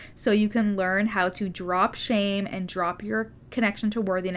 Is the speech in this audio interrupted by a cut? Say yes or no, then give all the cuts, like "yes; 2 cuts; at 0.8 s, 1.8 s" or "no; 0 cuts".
yes; 1 cut; at 3.4 s